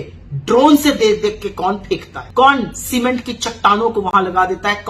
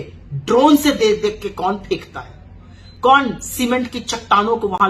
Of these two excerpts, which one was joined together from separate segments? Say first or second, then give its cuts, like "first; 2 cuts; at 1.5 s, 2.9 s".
first; 1 cut; at 2.2 s